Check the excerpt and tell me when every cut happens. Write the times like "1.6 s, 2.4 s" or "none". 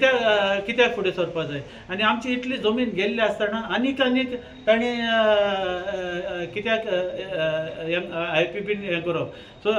none